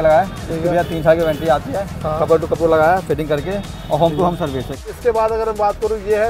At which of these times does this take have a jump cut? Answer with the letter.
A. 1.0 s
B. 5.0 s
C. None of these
B